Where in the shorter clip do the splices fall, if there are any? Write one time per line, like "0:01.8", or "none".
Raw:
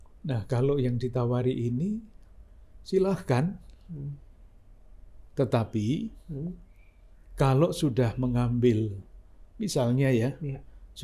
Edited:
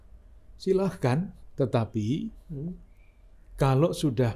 0:01.4